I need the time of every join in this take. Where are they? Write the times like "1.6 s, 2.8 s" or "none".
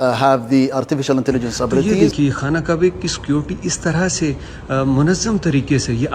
1.8 s